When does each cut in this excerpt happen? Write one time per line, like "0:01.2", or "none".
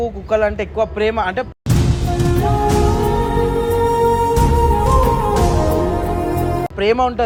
none